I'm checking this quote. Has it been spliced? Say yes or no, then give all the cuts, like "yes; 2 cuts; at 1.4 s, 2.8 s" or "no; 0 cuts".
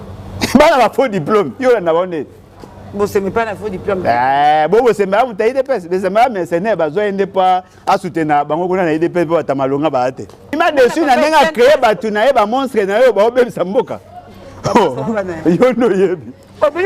yes; 1 cut; at 10.5 s